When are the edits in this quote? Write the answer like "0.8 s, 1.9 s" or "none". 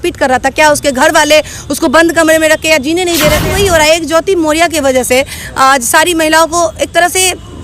3.4 s